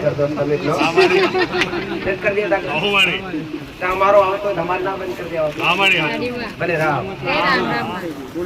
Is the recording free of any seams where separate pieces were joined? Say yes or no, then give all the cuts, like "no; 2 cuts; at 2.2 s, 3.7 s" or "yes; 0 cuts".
yes; 0 cuts